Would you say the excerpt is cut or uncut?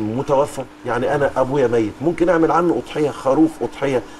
uncut